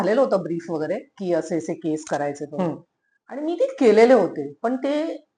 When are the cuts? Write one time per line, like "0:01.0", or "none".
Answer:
none